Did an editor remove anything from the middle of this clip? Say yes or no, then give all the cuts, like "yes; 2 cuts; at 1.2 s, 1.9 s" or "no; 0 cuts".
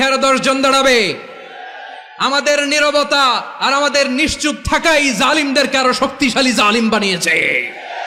no; 0 cuts